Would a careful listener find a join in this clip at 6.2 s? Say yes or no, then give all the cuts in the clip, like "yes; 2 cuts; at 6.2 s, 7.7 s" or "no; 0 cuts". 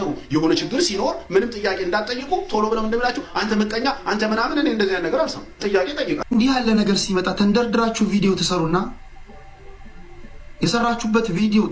yes; 1 cut; at 6.2 s